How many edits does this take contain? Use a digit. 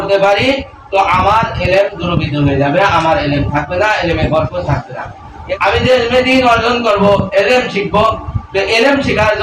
1